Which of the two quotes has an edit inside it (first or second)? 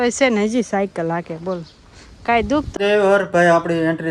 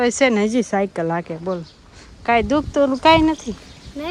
first